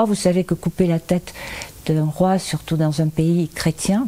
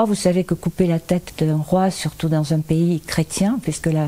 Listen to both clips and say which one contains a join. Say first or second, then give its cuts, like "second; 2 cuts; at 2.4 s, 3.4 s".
second; 1 cut; at 1.3 s